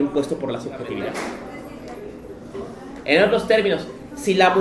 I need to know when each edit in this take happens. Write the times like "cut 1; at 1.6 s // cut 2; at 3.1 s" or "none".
cut 1; at 1.4 s